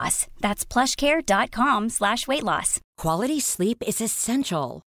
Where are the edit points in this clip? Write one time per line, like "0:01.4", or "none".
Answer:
0:02.8

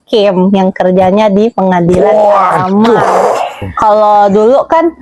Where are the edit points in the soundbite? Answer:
0:03.7

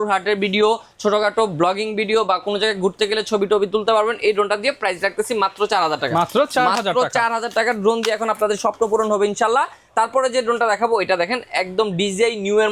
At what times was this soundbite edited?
none

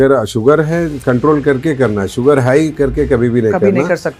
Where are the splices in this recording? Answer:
none

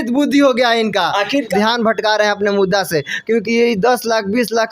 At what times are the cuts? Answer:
0:01.5

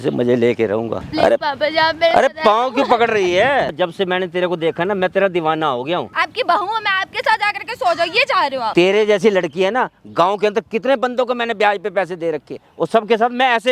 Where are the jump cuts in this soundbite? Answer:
0:01.1
0:03.8
0:06.1
0:08.7
0:12.6

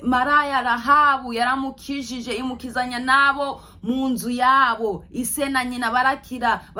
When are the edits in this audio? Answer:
none

